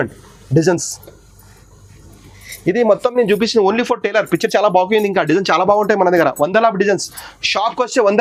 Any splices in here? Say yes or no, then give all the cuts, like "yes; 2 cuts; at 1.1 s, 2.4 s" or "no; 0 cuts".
no; 0 cuts